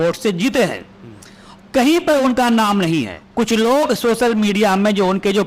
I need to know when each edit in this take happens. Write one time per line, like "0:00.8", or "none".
0:03.2